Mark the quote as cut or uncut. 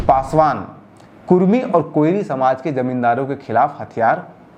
uncut